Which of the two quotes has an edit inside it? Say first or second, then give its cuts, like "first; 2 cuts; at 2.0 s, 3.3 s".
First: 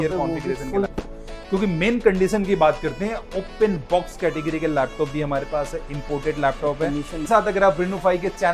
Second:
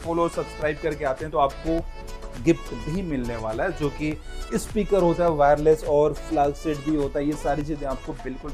first; 2 cuts; at 0.9 s, 7.2 s